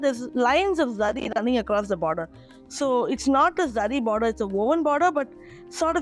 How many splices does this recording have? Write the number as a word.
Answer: zero